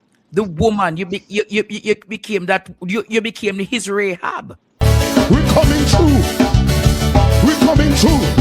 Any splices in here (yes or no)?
yes